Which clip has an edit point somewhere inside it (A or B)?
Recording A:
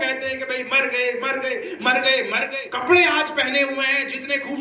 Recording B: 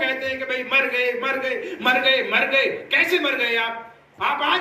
A